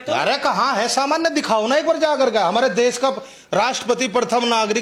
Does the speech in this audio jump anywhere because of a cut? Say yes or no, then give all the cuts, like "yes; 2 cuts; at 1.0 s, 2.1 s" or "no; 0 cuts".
no; 0 cuts